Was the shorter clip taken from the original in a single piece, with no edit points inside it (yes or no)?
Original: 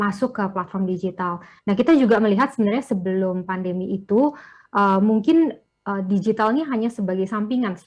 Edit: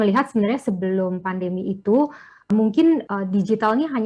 no